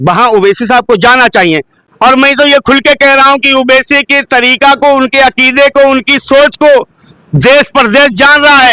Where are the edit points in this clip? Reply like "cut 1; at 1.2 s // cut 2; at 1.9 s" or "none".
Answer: cut 1; at 1.7 s